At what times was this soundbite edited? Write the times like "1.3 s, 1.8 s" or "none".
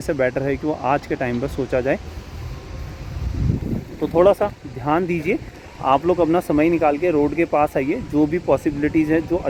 none